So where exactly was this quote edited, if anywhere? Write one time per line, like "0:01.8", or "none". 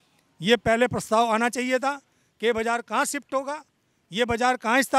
none